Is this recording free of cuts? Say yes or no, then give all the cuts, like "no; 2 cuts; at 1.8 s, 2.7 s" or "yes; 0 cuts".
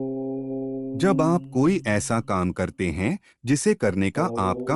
yes; 0 cuts